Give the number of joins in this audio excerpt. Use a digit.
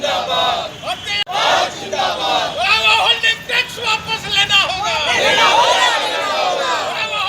1